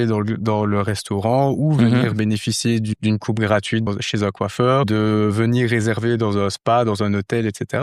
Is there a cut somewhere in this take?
yes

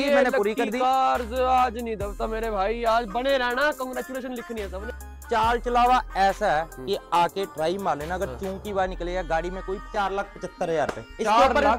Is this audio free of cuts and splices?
no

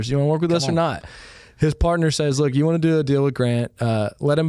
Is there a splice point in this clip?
no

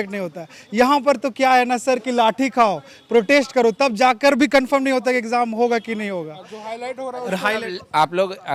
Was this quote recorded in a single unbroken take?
yes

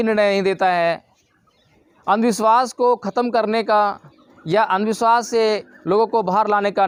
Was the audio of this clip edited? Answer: no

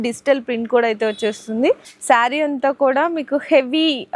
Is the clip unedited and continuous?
no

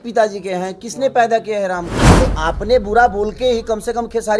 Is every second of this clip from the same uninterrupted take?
no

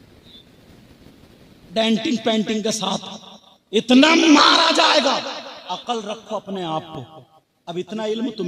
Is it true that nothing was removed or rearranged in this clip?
yes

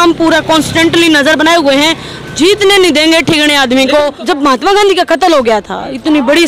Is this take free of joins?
no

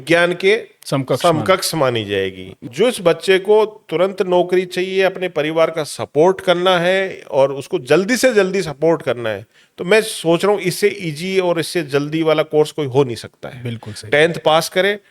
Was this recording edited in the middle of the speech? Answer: yes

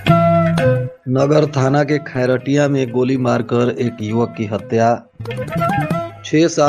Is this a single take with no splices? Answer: no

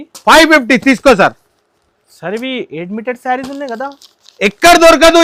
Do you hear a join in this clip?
no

